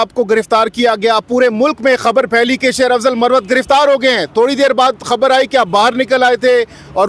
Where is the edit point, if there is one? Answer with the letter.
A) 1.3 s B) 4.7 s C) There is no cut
C